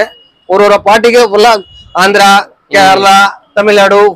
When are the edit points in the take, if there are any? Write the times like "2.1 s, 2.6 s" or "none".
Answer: none

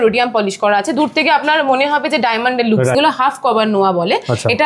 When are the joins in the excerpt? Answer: 2.9 s

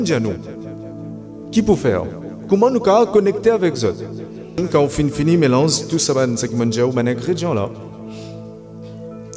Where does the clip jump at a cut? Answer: 4.6 s

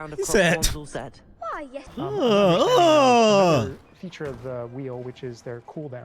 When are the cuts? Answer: 1.8 s

